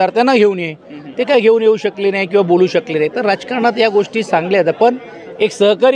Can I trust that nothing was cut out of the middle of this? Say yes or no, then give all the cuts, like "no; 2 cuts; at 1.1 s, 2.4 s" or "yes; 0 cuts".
yes; 0 cuts